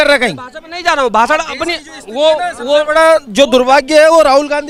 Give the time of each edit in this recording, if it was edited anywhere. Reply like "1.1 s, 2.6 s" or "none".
none